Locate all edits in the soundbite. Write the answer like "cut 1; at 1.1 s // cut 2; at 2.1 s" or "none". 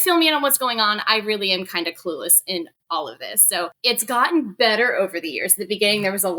cut 1; at 3.8 s